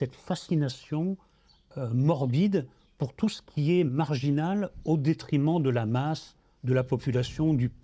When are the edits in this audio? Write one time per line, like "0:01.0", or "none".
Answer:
0:04.7